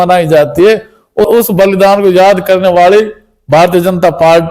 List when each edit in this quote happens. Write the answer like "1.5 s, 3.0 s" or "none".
1.3 s